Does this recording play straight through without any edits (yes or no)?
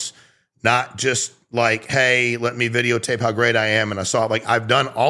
yes